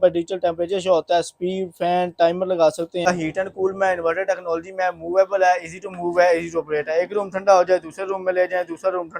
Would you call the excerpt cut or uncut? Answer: cut